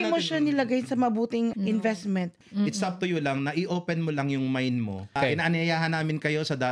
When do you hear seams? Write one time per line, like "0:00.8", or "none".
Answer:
0:01.5
0:02.4
0:05.2